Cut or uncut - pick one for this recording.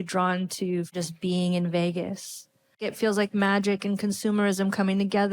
cut